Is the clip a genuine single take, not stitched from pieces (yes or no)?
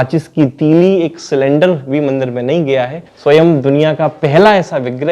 no